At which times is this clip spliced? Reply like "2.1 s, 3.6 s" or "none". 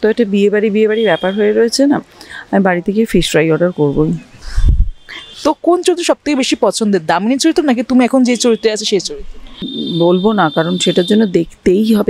5.2 s, 9.7 s

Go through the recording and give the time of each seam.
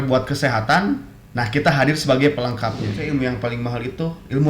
3.0 s

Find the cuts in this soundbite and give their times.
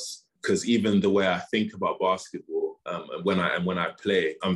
none

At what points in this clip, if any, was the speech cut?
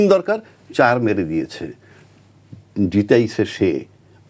none

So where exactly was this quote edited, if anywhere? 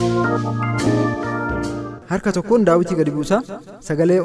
1.8 s

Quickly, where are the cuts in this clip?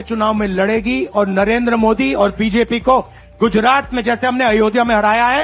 none

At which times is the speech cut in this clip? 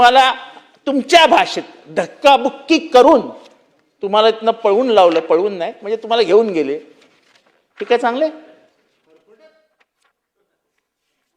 none

